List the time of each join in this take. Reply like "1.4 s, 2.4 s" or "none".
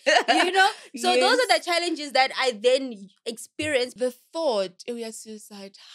3.9 s